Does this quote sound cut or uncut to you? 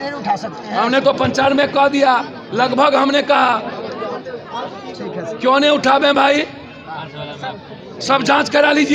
uncut